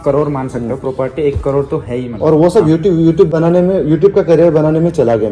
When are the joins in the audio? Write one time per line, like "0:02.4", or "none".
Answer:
none